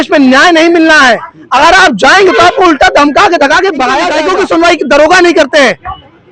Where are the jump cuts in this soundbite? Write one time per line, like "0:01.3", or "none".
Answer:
0:04.1